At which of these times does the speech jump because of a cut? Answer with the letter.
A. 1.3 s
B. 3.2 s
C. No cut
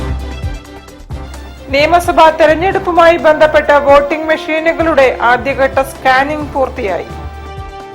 A